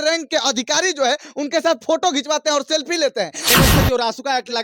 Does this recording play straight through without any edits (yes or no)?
no